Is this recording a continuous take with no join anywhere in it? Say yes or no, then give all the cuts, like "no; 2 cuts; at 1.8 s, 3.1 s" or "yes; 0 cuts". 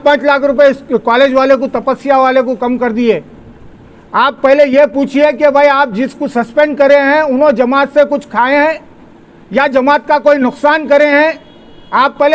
yes; 0 cuts